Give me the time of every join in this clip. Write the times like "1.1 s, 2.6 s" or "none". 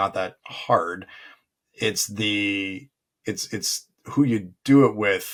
none